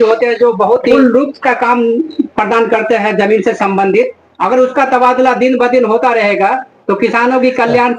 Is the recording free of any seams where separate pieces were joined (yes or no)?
no